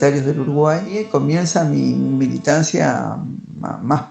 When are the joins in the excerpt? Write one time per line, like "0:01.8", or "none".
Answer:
0:00.9